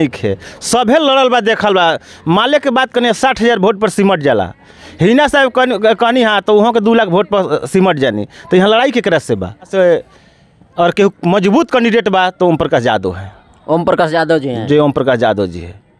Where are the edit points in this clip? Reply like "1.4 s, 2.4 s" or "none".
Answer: 9.7 s